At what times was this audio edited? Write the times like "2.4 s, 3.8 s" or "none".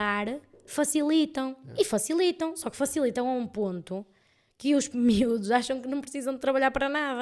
none